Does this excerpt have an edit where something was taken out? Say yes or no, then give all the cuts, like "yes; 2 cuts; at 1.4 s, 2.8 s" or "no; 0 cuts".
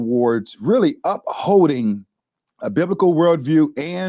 no; 0 cuts